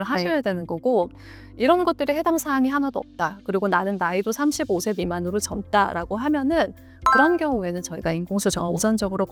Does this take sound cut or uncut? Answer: uncut